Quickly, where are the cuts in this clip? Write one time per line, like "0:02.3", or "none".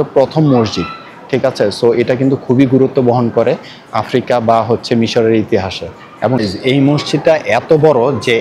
0:06.4